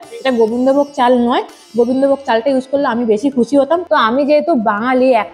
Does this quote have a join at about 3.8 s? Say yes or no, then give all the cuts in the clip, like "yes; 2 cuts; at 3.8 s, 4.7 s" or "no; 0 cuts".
yes; 1 cut; at 3.8 s